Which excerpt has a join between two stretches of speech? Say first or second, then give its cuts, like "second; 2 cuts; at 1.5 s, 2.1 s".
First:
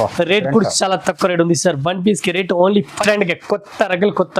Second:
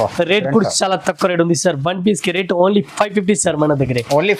first; 1 cut; at 3.0 s